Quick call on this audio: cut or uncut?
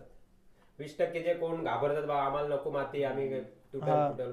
uncut